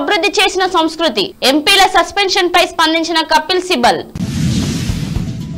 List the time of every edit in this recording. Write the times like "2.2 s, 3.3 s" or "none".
none